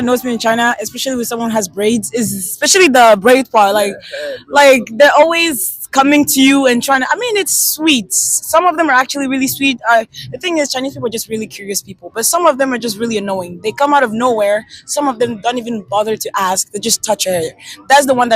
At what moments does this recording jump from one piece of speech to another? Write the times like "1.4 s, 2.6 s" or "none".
none